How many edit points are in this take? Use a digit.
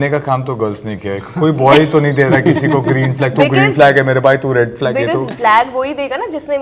0